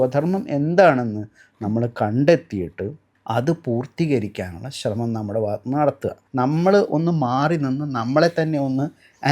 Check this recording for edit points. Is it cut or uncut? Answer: cut